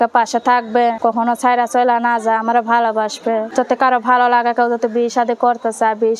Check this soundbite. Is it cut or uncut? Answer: cut